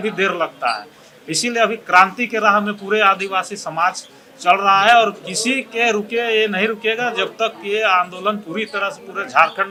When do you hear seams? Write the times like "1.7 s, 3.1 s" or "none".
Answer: none